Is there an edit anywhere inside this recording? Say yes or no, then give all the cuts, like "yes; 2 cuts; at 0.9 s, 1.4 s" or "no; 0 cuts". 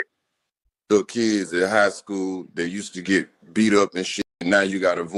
no; 0 cuts